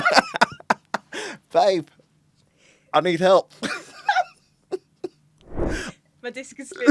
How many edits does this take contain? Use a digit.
0